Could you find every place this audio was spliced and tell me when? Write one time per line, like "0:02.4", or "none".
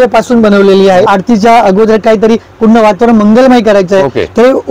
0:01.1